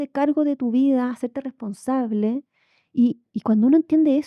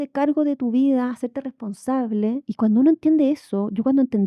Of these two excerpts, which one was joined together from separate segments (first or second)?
second